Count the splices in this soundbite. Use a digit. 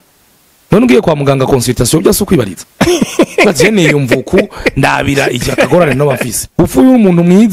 2